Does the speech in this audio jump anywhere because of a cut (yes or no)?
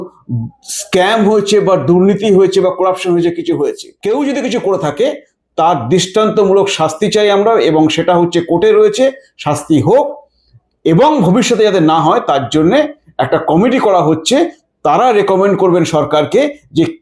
yes